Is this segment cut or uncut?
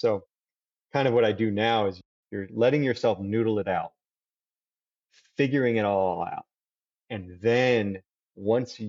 cut